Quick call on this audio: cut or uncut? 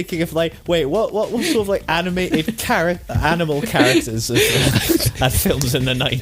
uncut